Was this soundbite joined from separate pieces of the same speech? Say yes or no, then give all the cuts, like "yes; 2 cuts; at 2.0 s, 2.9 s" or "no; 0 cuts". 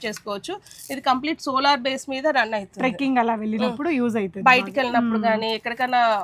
no; 0 cuts